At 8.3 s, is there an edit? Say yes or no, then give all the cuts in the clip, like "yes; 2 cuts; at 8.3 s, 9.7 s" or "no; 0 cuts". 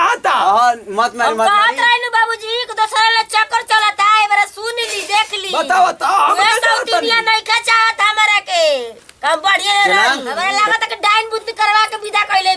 no; 1 cut; at 10.3 s